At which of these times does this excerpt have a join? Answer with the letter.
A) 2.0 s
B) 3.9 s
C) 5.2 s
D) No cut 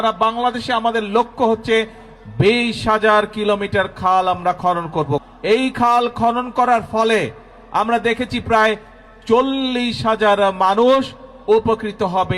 C